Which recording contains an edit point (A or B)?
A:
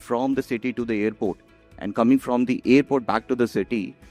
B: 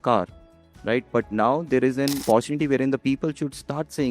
B